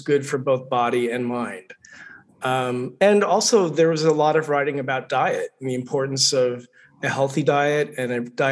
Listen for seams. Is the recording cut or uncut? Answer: uncut